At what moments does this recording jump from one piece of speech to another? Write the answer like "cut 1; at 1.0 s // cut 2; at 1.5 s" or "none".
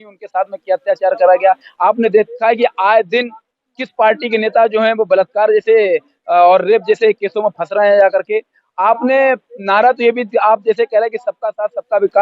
none